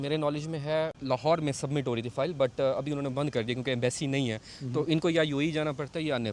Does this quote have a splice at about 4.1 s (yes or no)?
no